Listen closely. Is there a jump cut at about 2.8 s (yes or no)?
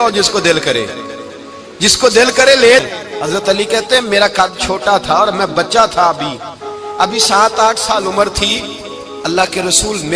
yes